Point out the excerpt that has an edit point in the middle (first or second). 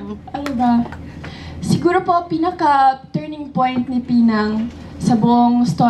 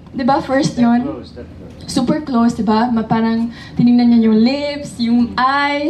second